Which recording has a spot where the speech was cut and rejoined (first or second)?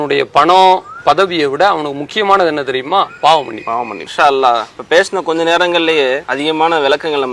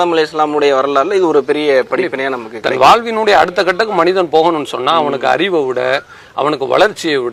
first